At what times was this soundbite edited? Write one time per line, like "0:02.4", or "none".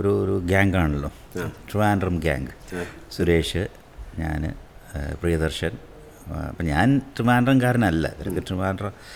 none